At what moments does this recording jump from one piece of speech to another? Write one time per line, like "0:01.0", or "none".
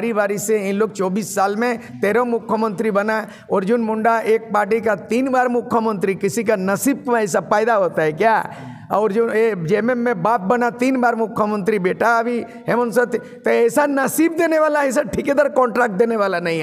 none